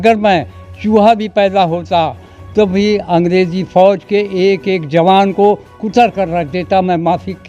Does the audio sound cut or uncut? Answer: uncut